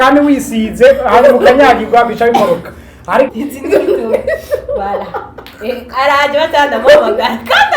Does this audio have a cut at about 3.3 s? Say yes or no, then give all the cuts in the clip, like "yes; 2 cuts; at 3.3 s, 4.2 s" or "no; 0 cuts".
yes; 1 cut; at 3.3 s